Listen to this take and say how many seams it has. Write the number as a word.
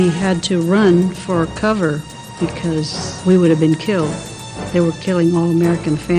one